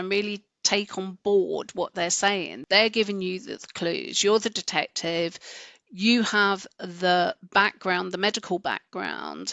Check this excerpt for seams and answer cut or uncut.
cut